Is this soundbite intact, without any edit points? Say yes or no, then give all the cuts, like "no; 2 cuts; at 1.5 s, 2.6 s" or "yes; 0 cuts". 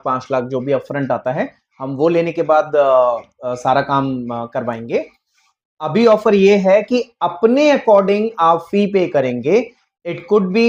yes; 0 cuts